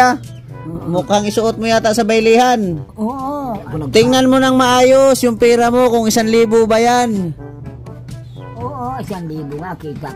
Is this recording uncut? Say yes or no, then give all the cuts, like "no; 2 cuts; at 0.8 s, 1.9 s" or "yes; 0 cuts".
no; 1 cut; at 3.6 s